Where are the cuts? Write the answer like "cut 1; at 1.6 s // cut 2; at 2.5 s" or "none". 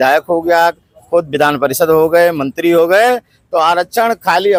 none